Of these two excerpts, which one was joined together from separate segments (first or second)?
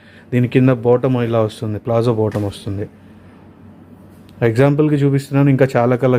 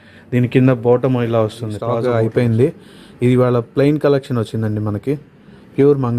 second